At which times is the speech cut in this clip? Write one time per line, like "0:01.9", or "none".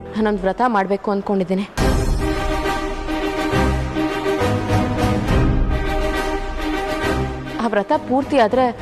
none